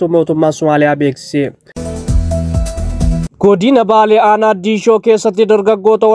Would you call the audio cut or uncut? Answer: cut